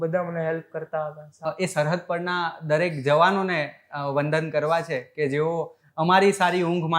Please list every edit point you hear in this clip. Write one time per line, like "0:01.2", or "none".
0:01.5